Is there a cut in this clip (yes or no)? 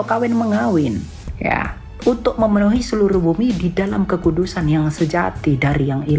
no